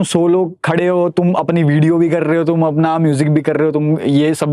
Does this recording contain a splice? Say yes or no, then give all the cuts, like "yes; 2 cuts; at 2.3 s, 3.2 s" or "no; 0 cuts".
no; 0 cuts